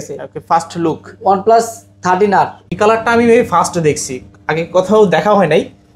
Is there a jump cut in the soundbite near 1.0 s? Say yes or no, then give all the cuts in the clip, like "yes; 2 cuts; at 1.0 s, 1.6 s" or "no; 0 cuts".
no; 1 cut; at 2.8 s